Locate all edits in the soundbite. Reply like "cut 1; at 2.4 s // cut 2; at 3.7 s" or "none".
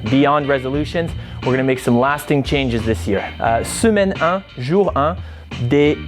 cut 1; at 3.3 s